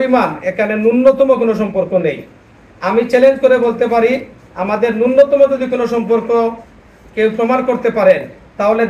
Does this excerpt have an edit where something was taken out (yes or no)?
no